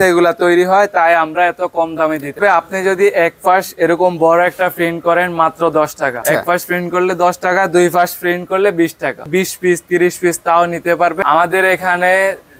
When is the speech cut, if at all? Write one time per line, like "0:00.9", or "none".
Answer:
0:02.4
0:06.2
0:09.3
0:11.2